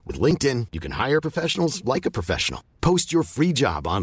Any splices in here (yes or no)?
no